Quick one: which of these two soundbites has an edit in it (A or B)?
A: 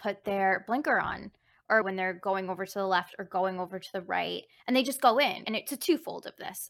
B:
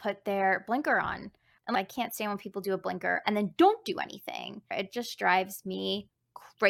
B